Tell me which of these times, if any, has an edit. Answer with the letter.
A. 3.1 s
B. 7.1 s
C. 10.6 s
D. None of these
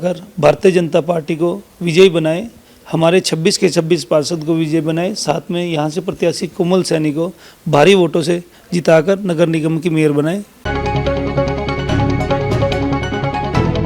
C